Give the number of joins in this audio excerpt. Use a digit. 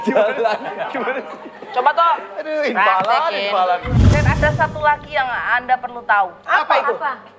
1